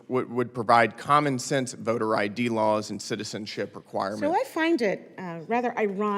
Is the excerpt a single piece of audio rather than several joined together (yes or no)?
no